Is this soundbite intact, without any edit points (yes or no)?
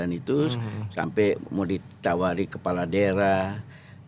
yes